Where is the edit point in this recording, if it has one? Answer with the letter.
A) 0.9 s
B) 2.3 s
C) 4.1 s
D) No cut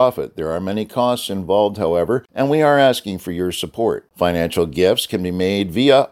B